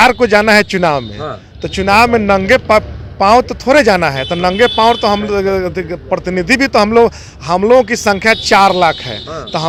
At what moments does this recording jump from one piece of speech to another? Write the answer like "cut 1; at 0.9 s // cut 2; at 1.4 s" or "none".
none